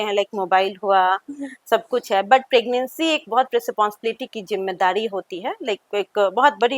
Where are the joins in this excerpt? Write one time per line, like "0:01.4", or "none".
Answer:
none